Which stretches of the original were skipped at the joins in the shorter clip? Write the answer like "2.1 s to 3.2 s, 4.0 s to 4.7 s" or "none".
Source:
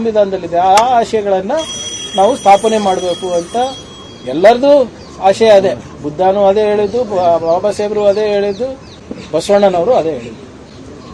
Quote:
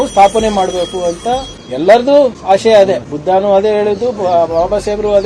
3.9 s to 4.1 s, 4.9 s to 5.1 s, 5.9 s to 6.0 s